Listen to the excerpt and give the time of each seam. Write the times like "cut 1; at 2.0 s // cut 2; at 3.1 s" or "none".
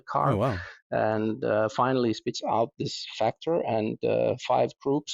none